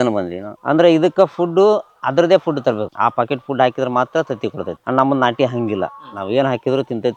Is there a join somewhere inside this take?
no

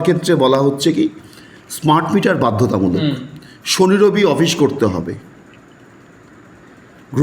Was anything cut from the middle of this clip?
no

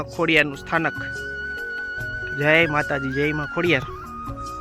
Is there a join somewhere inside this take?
yes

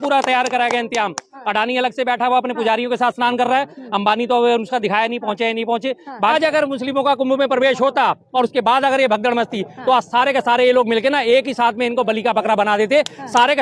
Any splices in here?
yes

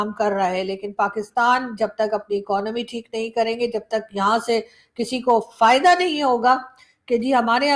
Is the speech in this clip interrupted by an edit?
no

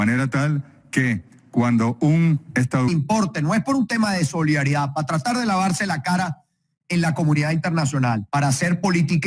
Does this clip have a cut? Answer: no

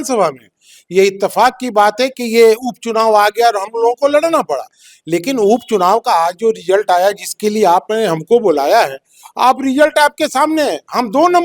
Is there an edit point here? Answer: no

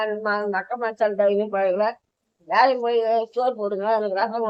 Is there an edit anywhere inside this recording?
no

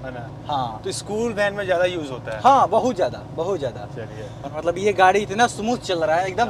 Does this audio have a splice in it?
yes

